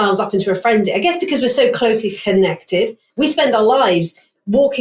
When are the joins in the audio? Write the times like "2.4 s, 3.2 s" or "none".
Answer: 3.0 s